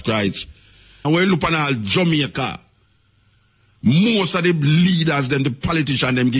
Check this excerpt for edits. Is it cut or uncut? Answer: cut